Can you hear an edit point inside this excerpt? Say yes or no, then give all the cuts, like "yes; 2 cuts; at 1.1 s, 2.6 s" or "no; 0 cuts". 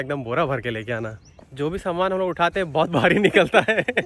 yes; 1 cut; at 1.4 s